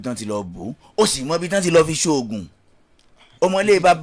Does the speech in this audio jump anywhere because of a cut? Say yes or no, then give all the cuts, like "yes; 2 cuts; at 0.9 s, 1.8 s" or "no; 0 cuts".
no; 0 cuts